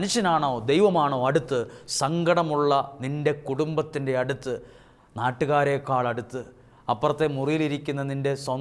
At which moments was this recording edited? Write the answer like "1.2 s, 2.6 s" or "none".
none